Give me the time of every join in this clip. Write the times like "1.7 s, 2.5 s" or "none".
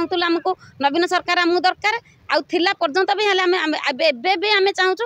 none